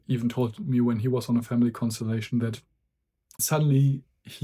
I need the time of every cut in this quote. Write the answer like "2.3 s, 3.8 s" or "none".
3.4 s